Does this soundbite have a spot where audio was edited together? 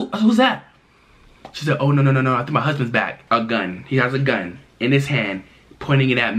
yes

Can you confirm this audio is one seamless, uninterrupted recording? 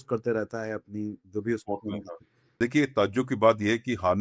no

